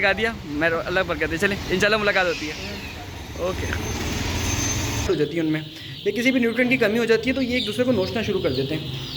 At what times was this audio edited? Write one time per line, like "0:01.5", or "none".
0:05.1